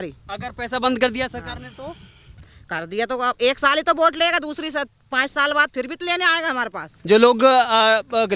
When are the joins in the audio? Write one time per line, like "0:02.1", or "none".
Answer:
0:06.9